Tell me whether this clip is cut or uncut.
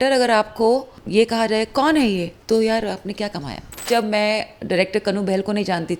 cut